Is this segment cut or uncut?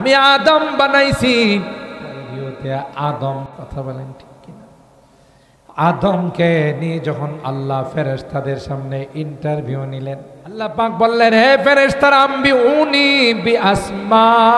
cut